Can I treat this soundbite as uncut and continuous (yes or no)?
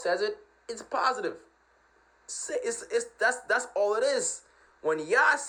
yes